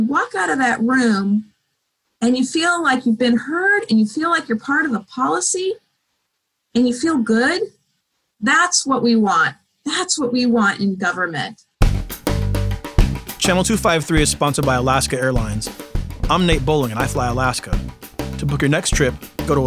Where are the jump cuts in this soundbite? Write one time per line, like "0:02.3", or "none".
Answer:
0:11.7